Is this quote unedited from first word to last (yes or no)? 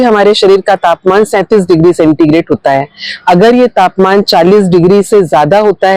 yes